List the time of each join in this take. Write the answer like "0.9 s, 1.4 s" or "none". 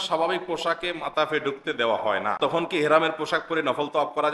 2.4 s